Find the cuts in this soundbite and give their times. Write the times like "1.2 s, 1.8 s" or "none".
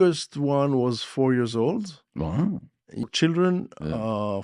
3.1 s